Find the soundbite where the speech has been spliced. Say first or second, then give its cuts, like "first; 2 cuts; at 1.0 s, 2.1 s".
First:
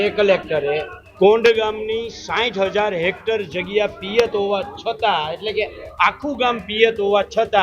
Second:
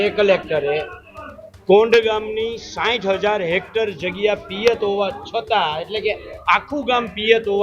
first; 1 cut; at 1.0 s